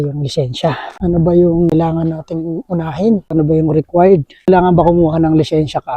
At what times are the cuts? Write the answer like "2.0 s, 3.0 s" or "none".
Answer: 3.3 s